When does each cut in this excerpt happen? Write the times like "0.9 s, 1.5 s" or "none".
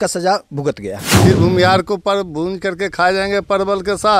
1.0 s